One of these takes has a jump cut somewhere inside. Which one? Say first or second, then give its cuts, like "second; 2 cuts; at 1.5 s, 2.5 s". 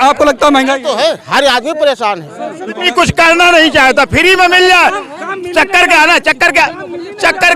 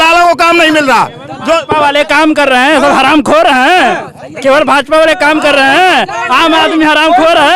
first; 1 cut; at 2.8 s